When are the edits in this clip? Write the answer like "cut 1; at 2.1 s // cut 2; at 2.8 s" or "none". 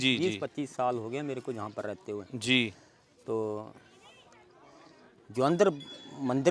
none